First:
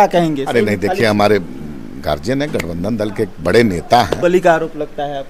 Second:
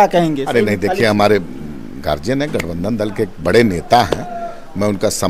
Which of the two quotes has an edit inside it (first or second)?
first